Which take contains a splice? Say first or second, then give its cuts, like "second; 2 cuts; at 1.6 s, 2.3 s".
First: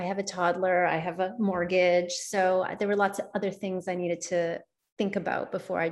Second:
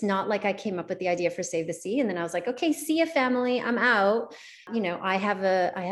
second; 1 cut; at 4.7 s